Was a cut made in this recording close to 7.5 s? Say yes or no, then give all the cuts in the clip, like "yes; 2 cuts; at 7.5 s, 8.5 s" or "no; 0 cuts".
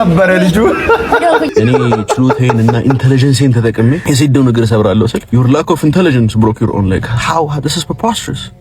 no; 3 cuts; at 1.5 s, 4.0 s, 5.2 s